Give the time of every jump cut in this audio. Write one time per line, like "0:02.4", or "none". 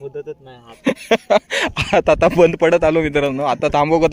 none